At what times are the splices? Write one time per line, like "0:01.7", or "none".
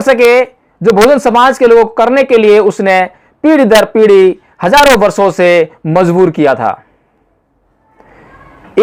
none